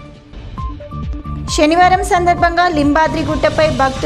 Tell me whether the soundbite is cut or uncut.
uncut